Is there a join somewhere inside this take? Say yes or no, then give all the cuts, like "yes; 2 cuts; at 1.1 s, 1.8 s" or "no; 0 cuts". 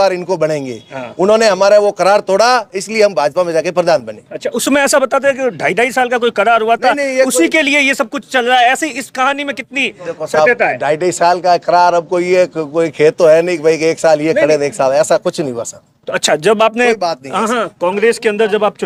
no; 0 cuts